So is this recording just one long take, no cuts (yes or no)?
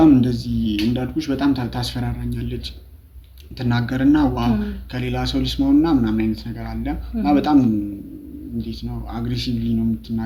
yes